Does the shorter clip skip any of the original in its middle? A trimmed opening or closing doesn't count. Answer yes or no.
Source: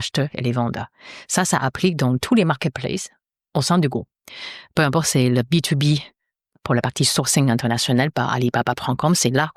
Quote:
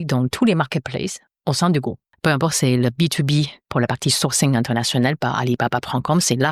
yes